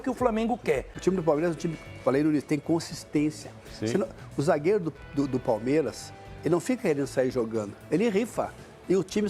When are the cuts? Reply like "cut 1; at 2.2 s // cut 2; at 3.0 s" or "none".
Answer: cut 1; at 0.9 s